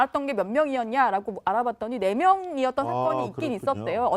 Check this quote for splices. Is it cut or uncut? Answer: cut